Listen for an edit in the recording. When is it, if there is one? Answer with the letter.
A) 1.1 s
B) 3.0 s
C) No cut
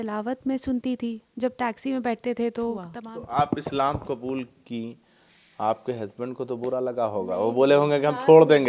B